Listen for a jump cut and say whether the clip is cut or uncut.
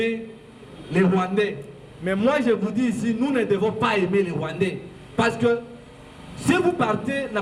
uncut